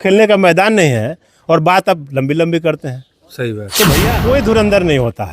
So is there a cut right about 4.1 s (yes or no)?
yes